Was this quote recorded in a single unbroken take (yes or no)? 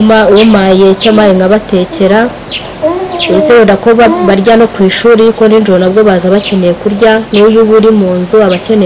yes